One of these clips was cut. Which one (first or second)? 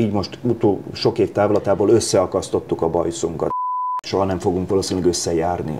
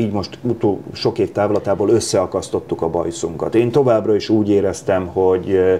first